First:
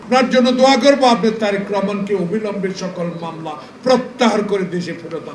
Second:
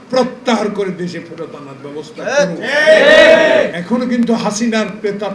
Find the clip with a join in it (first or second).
second